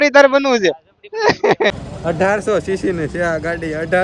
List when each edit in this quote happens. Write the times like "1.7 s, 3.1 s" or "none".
1.7 s